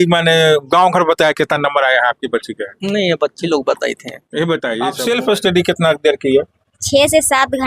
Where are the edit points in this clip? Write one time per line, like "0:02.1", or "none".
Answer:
0:05.0